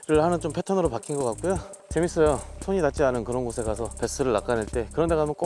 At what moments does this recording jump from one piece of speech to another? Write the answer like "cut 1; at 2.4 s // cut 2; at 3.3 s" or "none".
cut 1; at 1.7 s // cut 2; at 2.6 s // cut 3; at 3.9 s